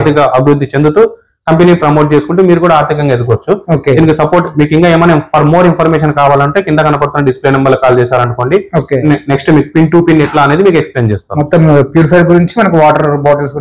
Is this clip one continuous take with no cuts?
yes; 0 cuts

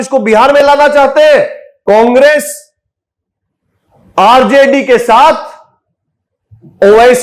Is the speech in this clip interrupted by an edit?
yes; 1 cut; at 1.7 s

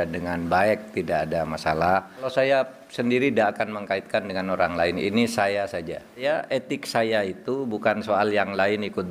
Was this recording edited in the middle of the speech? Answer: yes; 2 cuts; at 2.3 s, 6.2 s

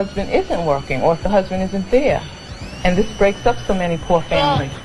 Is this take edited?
yes; 1 cut; at 2.4 s

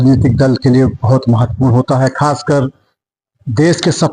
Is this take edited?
no; 0 cuts

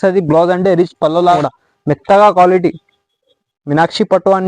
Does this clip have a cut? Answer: yes; 1 cut; at 1.4 s

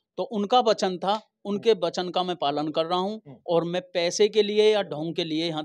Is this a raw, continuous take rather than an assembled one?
yes; 0 cuts

